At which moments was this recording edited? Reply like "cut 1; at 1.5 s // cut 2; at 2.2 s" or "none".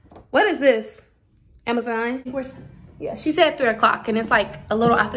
cut 1; at 2.3 s